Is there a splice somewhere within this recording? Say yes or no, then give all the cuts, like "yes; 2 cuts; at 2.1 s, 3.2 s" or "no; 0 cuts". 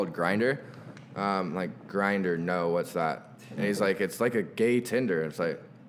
no; 0 cuts